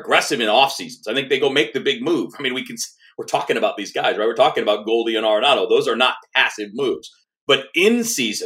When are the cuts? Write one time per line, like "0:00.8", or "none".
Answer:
0:07.2